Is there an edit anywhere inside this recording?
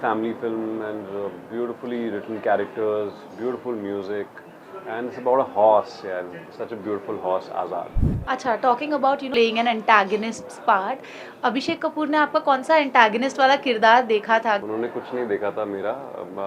yes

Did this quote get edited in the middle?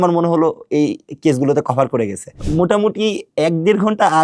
yes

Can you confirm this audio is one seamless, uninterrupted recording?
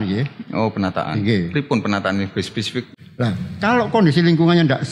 no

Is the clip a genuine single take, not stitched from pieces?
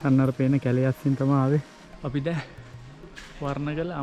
no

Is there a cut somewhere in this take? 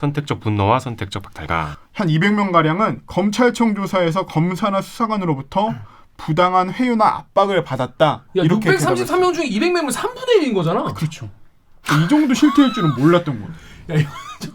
yes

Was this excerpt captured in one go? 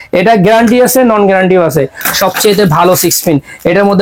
no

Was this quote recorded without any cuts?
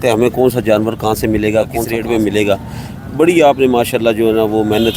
yes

